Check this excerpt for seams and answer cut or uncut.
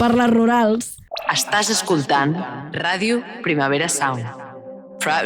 cut